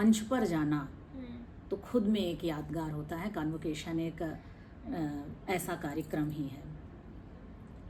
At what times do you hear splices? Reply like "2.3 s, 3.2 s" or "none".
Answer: none